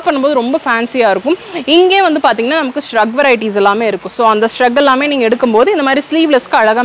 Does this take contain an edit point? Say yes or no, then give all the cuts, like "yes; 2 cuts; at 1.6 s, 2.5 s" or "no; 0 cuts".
no; 0 cuts